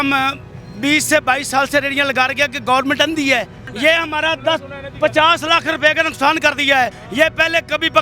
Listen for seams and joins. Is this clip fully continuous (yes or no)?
no